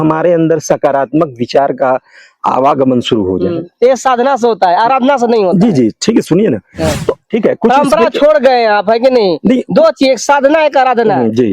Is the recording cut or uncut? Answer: cut